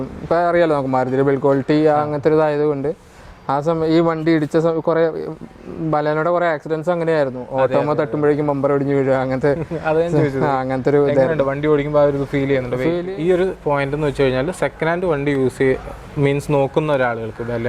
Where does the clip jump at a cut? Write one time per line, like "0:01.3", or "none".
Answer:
0:13.0